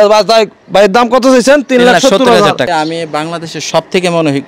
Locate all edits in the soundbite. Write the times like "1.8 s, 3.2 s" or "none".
2.7 s